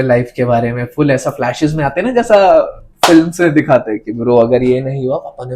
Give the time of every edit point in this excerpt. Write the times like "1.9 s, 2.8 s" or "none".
none